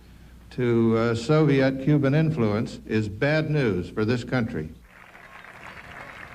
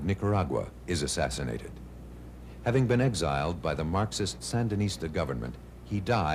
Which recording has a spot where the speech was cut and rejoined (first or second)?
first